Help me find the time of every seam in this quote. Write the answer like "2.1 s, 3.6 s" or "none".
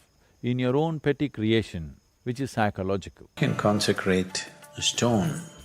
3.4 s

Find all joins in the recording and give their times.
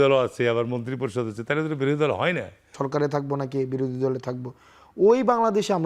2.8 s

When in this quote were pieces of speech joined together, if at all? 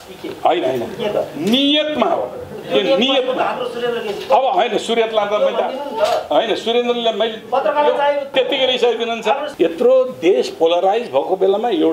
8.3 s, 9.5 s

